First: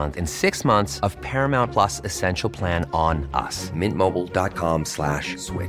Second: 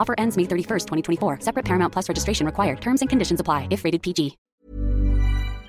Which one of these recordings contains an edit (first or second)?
second